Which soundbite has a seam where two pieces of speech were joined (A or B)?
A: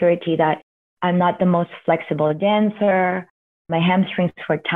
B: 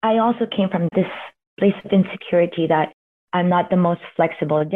B